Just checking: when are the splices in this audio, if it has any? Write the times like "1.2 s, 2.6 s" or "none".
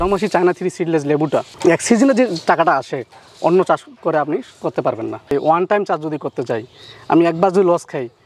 5.2 s